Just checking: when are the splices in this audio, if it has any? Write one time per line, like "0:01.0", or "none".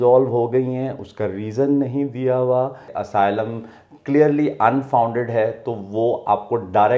0:02.9